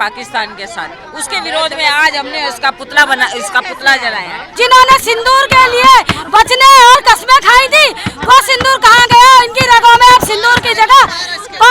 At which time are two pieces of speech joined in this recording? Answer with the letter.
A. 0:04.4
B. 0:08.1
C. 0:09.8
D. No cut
A